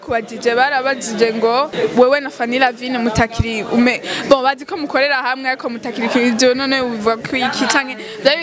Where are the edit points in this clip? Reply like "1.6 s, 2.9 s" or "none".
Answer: 1.7 s